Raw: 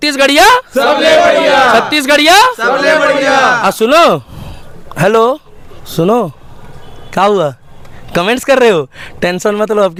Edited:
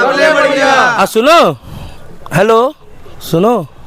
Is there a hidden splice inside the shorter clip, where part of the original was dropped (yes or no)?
no